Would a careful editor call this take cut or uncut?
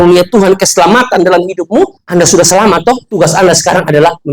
cut